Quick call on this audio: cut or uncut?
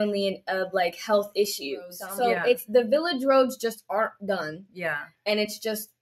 cut